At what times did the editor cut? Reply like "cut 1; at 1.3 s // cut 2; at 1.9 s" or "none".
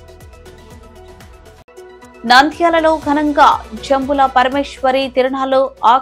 cut 1; at 1.6 s